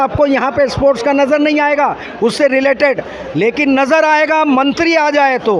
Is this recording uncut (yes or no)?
yes